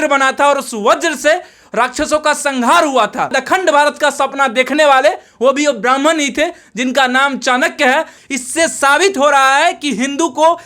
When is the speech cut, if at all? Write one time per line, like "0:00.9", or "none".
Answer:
0:03.3
0:08.2